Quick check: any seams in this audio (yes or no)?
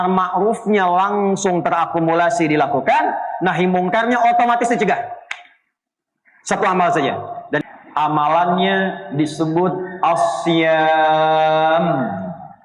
yes